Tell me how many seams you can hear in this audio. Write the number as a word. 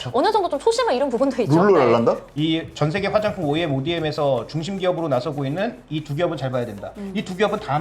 one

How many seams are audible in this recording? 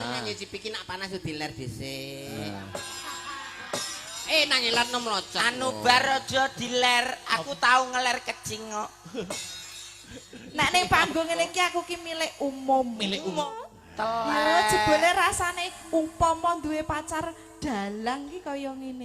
one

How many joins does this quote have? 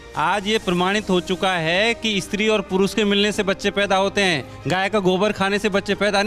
zero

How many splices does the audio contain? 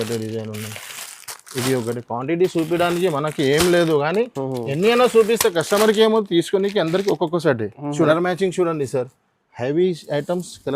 one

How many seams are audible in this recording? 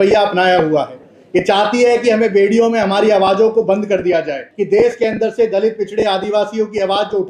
one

